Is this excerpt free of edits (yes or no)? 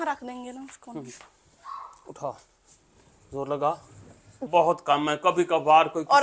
no